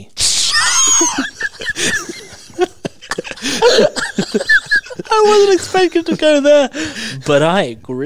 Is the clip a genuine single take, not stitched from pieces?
yes; 0 cuts

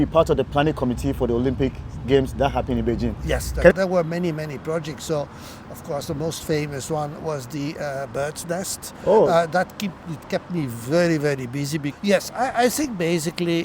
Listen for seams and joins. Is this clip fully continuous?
no; 2 cuts; at 3.7 s, 11.9 s

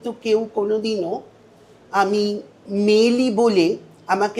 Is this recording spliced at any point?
yes; 1 cut; at 2.5 s

